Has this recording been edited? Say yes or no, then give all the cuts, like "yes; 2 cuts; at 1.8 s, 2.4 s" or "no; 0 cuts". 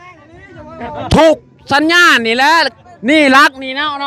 yes; 1 cut; at 2.7 s